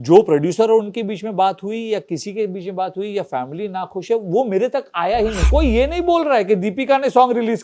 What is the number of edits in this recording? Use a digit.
1